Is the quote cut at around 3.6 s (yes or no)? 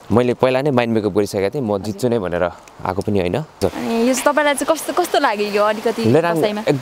yes